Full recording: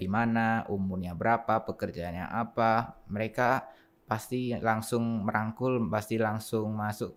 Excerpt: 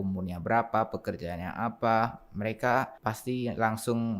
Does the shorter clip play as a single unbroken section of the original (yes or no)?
no